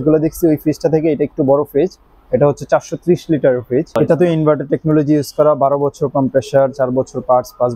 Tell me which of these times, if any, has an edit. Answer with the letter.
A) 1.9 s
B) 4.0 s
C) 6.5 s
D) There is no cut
B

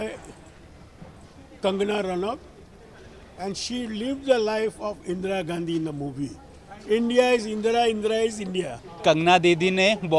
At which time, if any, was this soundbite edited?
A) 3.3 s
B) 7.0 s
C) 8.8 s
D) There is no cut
C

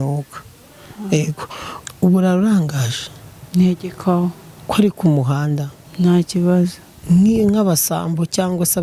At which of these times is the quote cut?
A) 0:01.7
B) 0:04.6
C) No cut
A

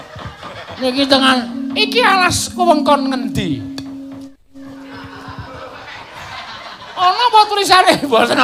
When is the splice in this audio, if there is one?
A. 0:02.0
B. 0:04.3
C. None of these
C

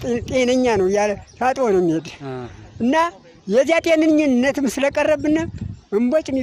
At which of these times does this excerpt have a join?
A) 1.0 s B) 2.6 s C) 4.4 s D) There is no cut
C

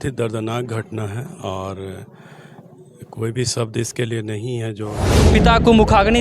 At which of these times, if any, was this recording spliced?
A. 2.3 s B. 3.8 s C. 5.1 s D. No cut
C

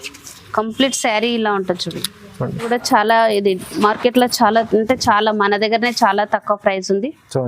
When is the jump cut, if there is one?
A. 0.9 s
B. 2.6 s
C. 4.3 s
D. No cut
B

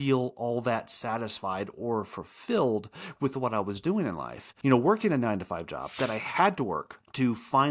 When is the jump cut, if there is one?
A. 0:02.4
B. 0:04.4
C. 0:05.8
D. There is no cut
B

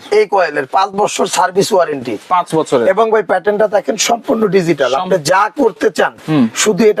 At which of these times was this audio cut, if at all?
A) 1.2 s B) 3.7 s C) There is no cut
C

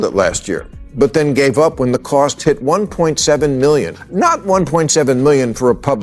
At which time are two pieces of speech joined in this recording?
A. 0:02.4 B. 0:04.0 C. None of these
B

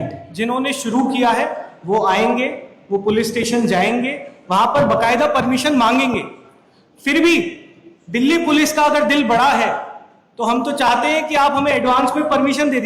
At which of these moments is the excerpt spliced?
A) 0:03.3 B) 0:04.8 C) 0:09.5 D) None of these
D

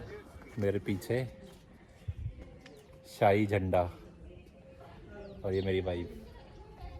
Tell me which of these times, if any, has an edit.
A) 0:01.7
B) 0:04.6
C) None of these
C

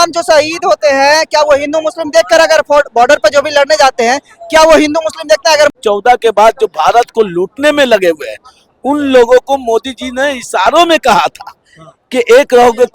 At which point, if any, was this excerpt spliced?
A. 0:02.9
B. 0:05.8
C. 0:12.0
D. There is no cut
B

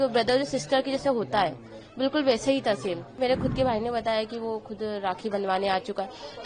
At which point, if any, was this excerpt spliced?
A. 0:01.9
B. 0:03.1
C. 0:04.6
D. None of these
B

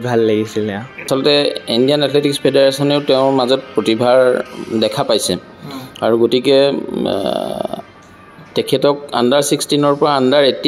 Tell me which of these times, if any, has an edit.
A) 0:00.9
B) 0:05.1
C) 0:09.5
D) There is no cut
A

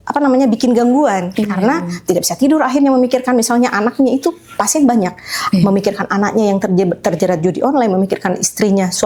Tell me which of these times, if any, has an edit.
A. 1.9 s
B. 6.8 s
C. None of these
C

